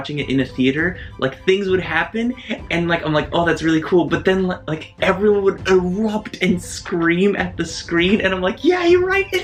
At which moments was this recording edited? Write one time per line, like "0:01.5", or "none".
none

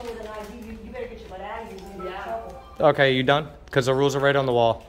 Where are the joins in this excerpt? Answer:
0:01.7

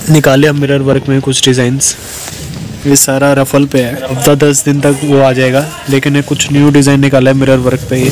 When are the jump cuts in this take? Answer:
0:04.2

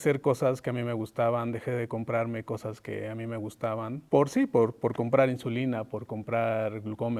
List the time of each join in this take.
none

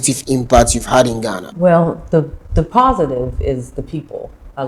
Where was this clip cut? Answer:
0:01.4

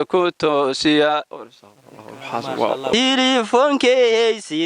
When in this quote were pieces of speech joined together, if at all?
0:02.9

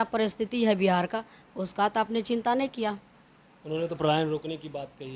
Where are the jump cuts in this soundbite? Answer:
none

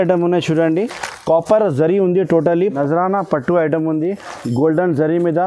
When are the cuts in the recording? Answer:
0:02.8

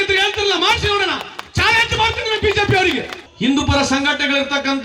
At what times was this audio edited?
0:03.2

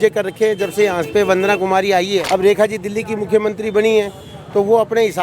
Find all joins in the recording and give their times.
0:02.2

